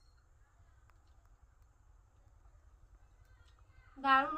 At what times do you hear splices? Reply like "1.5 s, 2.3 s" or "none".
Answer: none